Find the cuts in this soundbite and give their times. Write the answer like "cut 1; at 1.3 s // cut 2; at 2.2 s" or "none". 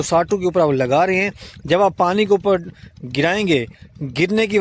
none